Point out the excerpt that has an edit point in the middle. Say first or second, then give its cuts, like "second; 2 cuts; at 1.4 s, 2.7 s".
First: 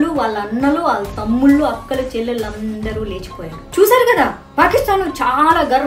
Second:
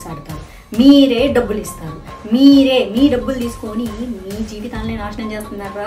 first; 1 cut; at 3.6 s